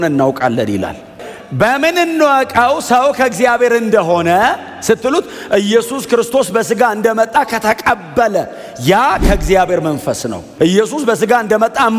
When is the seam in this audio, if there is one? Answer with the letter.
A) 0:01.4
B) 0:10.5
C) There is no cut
B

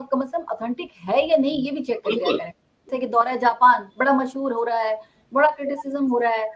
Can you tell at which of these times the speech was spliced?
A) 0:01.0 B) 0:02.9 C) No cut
C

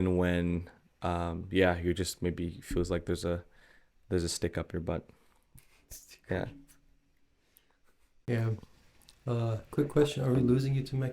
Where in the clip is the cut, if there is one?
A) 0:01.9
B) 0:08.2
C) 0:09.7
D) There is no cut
B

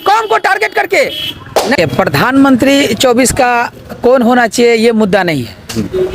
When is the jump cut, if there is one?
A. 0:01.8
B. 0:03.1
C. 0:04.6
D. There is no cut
A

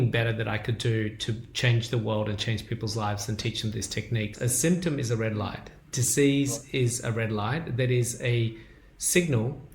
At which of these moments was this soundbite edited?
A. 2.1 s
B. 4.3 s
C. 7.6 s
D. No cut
B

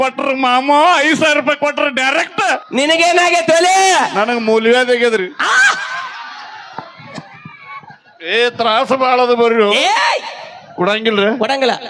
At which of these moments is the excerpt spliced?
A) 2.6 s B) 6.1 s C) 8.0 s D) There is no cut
A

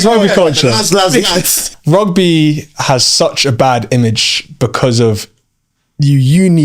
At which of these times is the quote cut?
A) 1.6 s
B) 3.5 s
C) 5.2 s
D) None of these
A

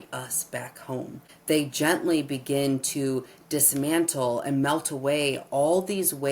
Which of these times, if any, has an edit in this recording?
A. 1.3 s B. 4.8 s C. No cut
A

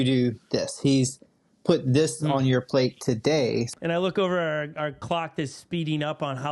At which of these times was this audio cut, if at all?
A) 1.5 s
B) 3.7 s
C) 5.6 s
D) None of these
B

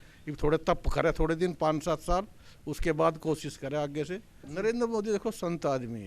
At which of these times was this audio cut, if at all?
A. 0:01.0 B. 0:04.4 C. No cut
B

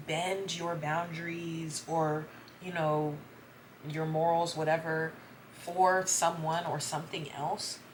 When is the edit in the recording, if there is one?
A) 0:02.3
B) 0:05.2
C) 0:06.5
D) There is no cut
D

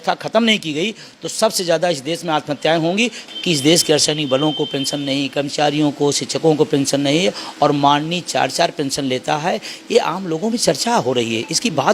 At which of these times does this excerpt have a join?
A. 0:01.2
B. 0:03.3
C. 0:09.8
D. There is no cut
B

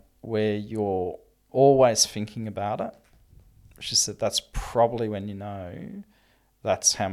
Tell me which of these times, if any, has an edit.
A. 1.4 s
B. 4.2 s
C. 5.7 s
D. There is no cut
A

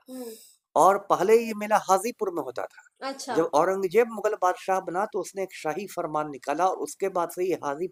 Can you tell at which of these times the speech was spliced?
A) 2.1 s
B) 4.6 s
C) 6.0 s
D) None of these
D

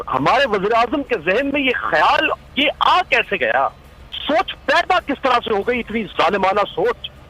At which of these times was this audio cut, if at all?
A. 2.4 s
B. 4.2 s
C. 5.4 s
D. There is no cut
B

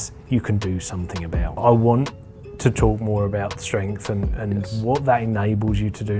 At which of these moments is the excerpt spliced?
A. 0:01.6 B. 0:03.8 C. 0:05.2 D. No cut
A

